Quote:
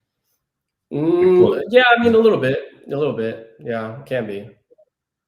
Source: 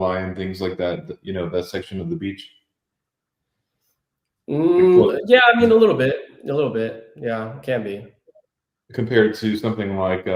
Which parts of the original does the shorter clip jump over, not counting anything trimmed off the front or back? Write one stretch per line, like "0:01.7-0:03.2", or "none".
none